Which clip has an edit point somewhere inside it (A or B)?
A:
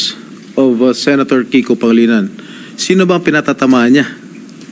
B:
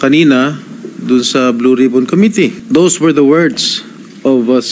B